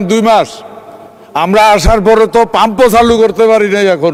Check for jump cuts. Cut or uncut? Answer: uncut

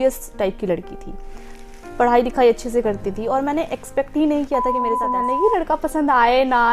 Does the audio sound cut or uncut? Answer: cut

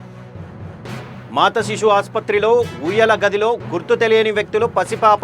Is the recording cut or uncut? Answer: cut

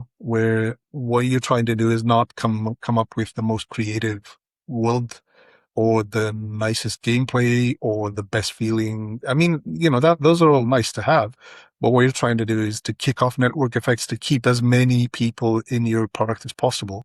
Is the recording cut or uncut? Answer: uncut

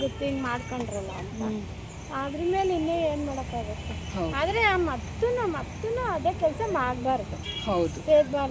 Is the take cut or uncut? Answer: uncut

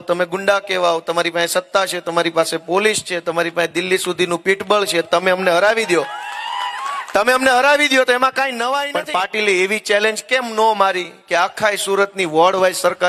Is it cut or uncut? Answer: cut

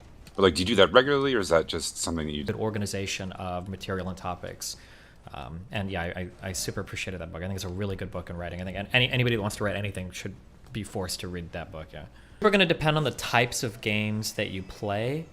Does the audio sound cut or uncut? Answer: cut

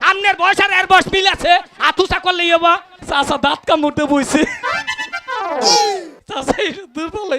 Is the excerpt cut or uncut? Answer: cut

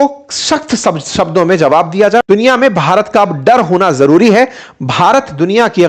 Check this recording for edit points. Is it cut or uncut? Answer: cut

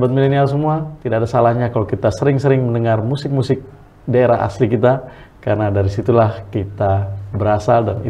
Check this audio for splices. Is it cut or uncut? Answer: uncut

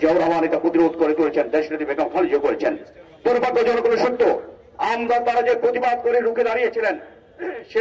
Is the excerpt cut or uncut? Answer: uncut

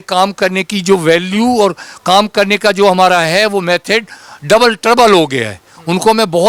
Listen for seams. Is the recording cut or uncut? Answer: uncut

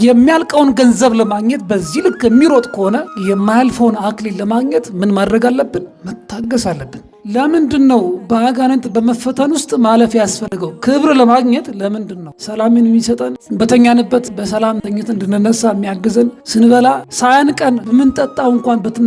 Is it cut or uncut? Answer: cut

